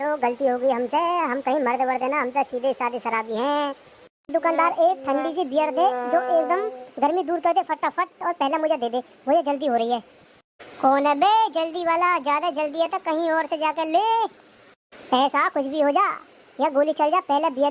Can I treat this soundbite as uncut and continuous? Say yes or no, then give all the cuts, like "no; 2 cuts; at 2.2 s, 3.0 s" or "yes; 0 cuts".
no; 1 cut; at 4.3 s